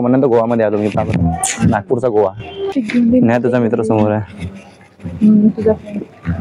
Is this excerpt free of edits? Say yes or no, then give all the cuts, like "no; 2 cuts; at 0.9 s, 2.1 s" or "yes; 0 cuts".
no; 1 cut; at 2.7 s